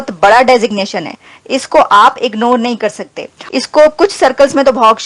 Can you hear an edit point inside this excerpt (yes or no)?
yes